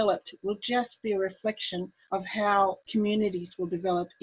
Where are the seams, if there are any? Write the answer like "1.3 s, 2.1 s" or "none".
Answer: 2.8 s